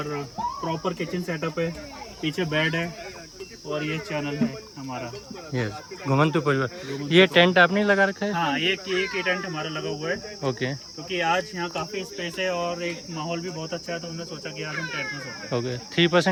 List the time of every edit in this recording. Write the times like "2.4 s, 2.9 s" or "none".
none